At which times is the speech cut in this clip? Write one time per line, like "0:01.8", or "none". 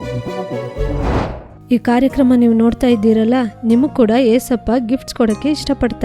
0:01.4